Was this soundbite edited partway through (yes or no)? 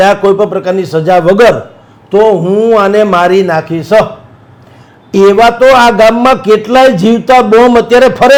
no